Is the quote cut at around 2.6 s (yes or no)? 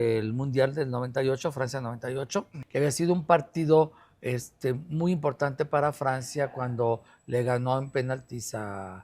yes